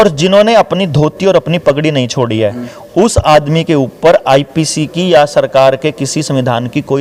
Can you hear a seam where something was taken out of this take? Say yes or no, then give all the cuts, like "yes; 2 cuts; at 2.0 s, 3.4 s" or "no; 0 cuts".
no; 0 cuts